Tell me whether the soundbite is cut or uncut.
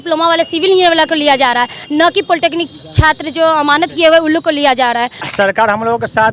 cut